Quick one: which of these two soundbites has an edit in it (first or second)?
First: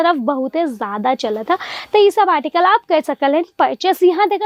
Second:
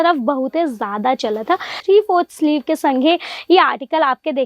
second